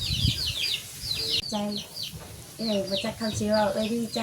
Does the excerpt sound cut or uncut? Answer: cut